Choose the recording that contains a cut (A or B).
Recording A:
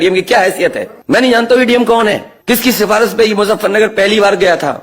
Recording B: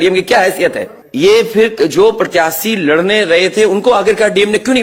A